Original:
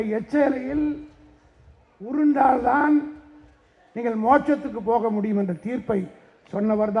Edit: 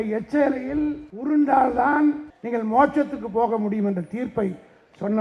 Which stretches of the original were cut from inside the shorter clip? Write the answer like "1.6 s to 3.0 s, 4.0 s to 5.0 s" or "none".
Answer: 1.1 s to 2.0 s, 3.2 s to 3.9 s